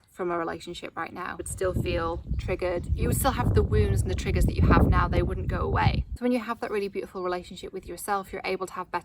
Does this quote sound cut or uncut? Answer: cut